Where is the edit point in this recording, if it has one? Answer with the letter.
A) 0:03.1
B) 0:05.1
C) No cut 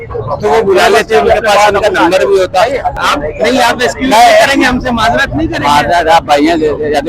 A